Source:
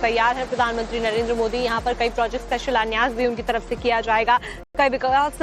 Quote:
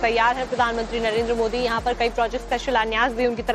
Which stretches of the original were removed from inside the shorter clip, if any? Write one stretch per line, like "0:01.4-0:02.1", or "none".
none